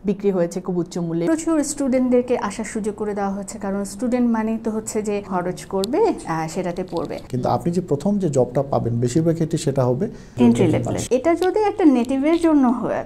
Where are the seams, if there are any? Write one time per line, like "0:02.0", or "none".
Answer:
0:01.3
0:05.3
0:07.2
0:10.9

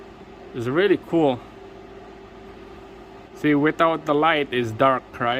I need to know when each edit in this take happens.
0:03.3

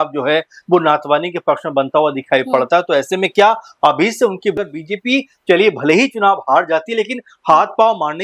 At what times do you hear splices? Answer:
0:04.6

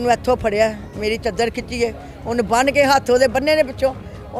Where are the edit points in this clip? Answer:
none

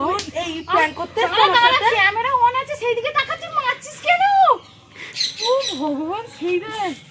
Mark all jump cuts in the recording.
none

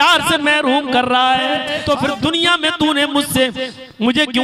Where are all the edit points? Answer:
0:01.7

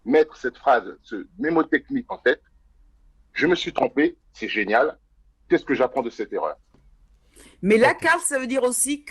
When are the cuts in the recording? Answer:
none

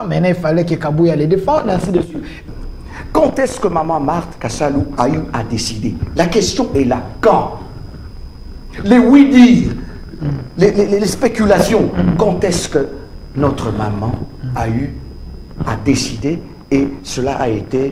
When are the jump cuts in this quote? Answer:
0:02.5

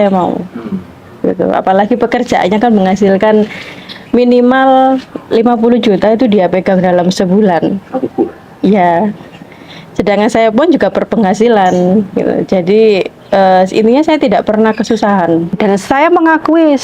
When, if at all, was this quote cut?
0:15.6

